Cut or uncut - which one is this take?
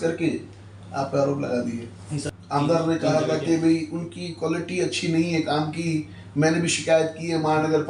cut